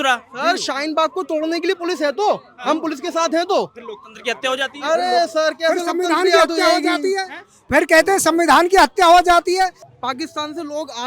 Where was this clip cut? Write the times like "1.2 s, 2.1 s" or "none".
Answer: 9.9 s